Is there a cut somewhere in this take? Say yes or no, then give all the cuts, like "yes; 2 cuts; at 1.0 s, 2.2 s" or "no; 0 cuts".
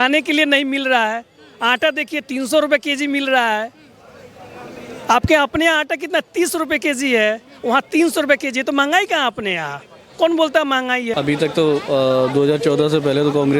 yes; 1 cut; at 11.1 s